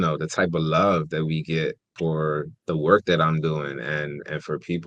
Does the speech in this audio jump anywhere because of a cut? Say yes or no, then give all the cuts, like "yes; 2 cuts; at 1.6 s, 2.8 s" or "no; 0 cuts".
yes; 1 cut; at 2.2 s